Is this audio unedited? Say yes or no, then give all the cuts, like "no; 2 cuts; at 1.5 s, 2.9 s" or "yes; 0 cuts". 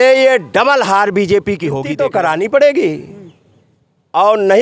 no; 1 cut; at 1.8 s